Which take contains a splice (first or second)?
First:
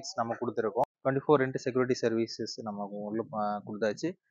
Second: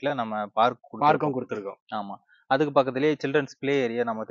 first